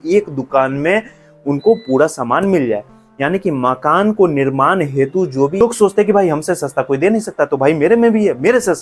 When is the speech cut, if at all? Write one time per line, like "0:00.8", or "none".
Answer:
0:05.6